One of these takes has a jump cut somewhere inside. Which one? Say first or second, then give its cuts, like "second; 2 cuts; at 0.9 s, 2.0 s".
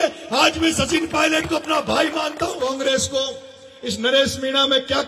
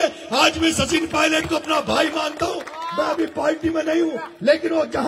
first; 1 cut; at 2.6 s